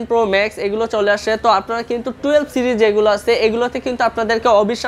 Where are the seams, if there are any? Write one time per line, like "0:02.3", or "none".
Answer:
none